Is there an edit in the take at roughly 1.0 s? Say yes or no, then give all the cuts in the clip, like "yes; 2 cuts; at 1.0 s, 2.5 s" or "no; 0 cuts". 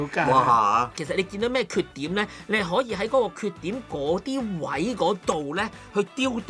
yes; 1 cut; at 1.0 s